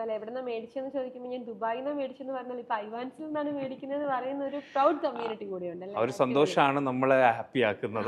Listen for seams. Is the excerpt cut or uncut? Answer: uncut